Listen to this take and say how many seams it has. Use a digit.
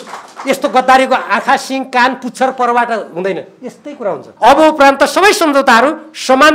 1